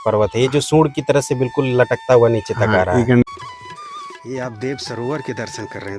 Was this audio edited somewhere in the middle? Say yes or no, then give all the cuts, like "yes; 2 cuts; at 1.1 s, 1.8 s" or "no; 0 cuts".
yes; 1 cut; at 3.2 s